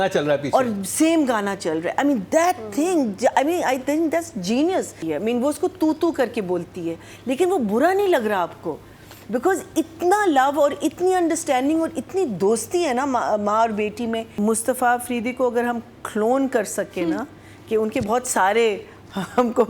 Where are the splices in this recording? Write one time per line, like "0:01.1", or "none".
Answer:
0:05.0
0:14.3